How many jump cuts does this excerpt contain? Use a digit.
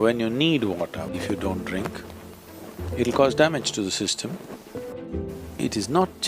2